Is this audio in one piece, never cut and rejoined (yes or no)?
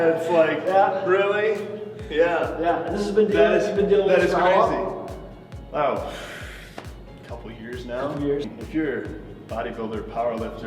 no